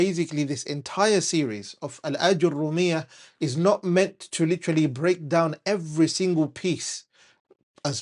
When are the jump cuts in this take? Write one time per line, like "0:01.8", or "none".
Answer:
none